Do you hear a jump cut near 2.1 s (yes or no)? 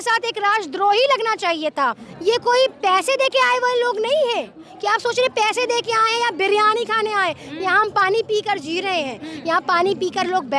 yes